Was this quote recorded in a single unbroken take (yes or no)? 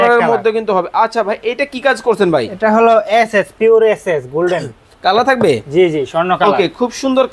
yes